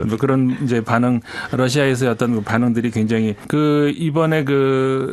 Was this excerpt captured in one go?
no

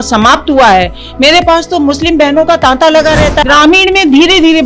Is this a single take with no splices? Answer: no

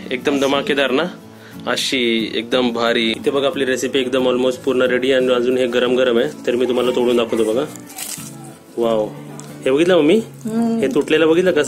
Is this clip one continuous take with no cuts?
no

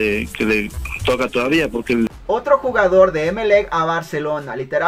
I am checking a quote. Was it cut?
yes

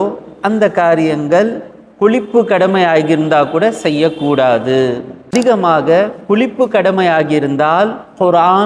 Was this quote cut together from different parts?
yes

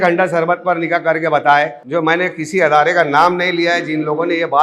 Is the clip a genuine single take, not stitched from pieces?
no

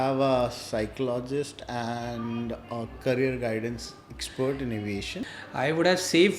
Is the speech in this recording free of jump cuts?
no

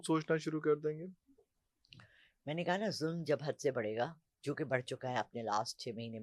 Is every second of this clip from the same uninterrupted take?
yes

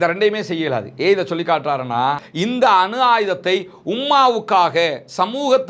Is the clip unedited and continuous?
no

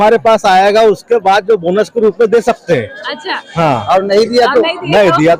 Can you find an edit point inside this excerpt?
no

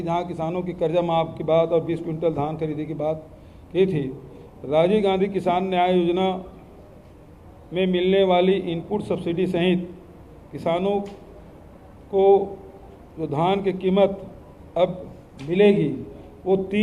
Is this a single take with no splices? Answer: yes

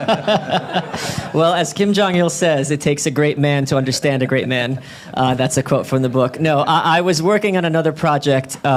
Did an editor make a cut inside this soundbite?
no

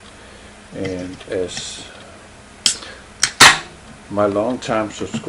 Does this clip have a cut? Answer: yes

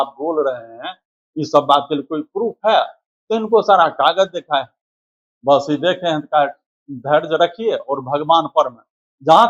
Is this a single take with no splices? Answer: yes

